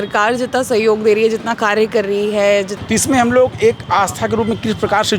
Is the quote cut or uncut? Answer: cut